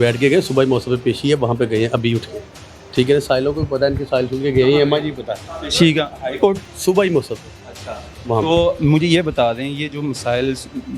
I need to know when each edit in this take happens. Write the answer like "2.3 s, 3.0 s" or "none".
none